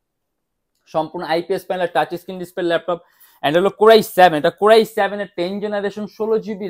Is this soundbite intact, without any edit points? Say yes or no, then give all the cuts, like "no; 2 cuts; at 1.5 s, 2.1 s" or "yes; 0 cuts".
yes; 0 cuts